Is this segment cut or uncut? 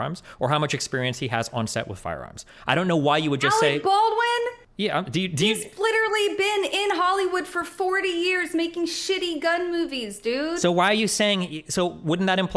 cut